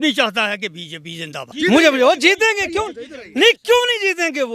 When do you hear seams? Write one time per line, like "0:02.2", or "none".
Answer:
0:01.5